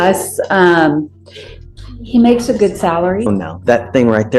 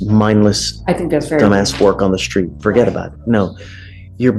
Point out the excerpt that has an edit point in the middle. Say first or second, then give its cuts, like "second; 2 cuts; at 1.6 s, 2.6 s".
first; 1 cut; at 3.3 s